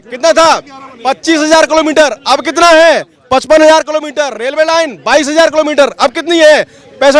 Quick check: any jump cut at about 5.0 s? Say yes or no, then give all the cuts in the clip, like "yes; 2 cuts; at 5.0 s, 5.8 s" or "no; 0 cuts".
no; 0 cuts